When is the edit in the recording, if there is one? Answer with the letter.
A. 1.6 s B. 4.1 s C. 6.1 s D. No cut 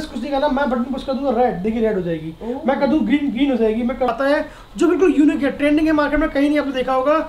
B